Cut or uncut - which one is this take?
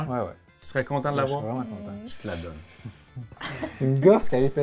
cut